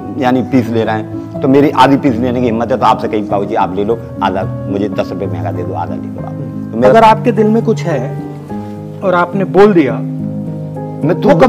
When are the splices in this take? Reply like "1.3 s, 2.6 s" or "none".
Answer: 6.9 s

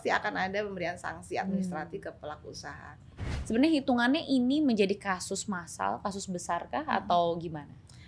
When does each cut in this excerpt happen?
3.3 s

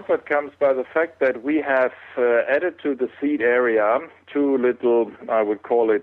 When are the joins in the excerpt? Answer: none

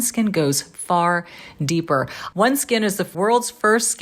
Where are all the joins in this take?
2.2 s

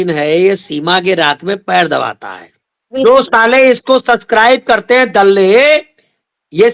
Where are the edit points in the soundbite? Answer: 3.0 s

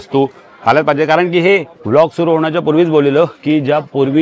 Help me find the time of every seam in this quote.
1.7 s

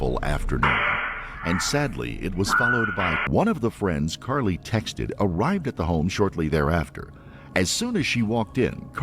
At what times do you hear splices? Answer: 3.2 s

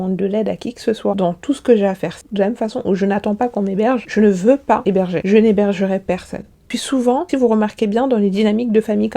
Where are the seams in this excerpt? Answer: 2.2 s, 6.8 s

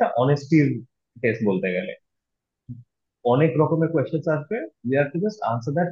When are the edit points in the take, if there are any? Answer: none

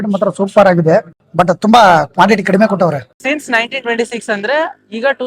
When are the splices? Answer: 1.2 s, 3.2 s

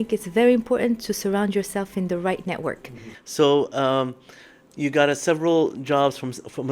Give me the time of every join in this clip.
none

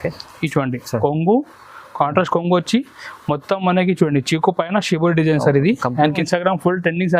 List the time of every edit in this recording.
6.2 s

